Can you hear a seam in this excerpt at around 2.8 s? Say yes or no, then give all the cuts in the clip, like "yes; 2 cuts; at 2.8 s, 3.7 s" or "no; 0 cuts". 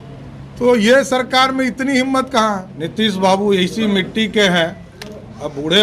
yes; 1 cut; at 2.8 s